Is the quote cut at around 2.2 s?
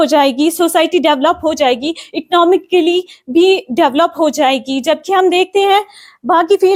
no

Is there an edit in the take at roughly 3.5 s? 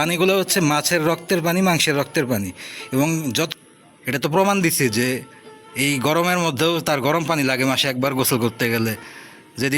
yes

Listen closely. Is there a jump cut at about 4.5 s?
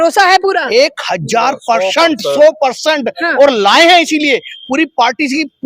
no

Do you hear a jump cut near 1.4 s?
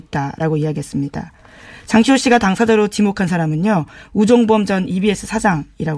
no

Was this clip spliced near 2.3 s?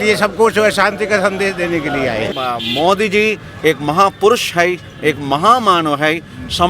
yes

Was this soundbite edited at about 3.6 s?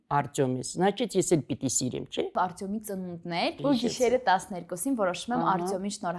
yes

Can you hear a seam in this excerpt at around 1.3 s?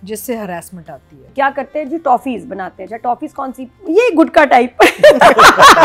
yes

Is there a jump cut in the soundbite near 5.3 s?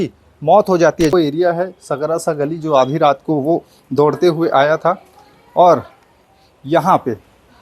no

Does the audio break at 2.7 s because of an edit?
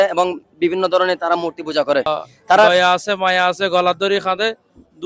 yes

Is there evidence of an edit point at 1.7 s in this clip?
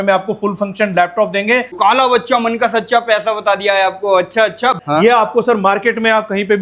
yes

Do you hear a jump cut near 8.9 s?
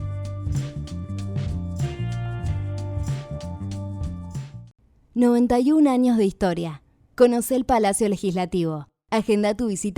no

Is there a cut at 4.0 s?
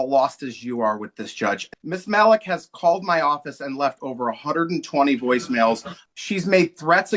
no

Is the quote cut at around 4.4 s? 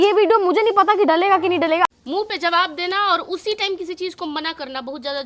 no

